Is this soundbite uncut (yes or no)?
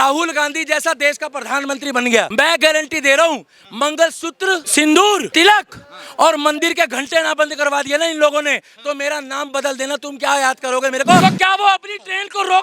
no